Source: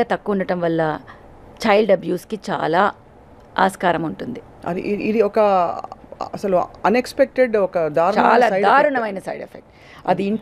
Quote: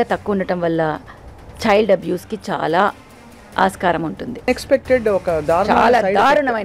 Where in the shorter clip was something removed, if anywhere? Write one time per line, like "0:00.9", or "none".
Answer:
0:04.5